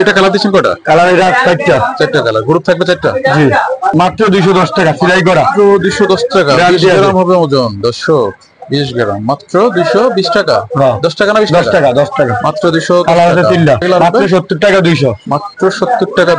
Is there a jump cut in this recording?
yes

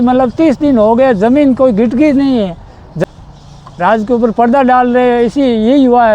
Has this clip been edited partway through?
yes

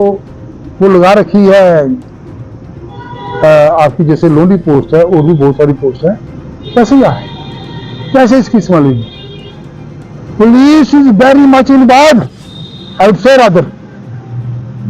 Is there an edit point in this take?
no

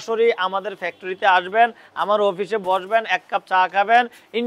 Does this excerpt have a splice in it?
no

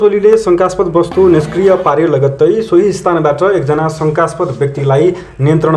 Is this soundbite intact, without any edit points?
yes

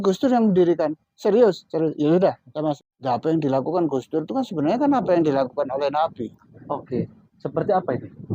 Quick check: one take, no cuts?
no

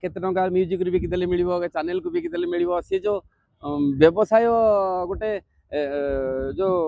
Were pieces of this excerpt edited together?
no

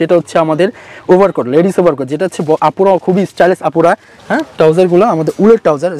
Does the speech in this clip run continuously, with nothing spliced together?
no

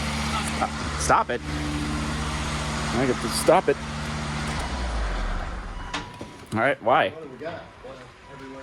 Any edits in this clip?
no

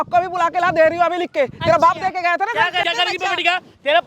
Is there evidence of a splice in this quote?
yes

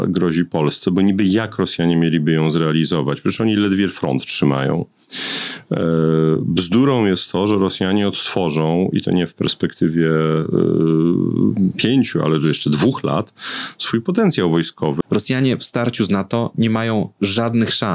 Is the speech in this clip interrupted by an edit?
yes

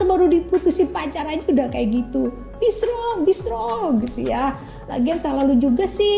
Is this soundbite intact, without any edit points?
yes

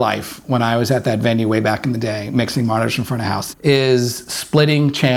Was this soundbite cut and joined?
yes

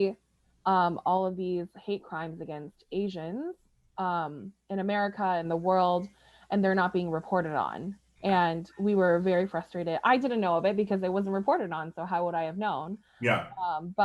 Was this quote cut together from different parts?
no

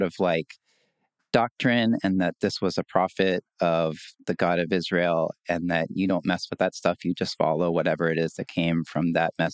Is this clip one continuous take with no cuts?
yes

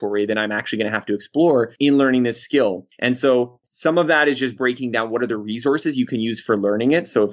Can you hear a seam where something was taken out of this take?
yes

